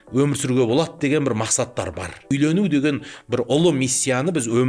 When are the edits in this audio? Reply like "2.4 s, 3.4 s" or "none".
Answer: 2.3 s